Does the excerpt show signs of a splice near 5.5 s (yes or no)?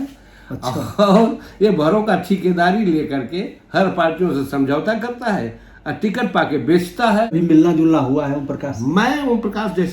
no